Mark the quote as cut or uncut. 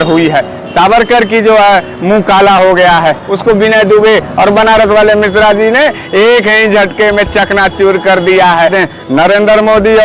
cut